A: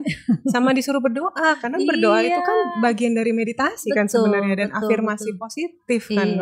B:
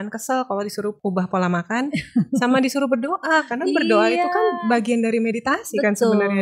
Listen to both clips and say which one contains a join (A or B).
B